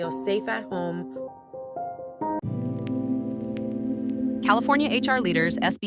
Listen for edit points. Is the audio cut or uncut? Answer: cut